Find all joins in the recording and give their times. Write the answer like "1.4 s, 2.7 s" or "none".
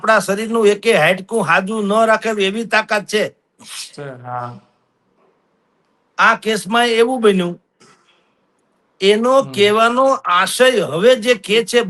none

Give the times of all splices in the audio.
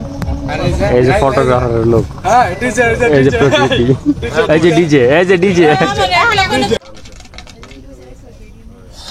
6.8 s

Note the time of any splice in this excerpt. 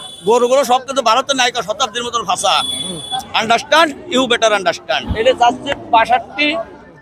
5.0 s

